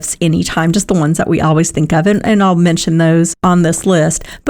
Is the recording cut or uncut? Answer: cut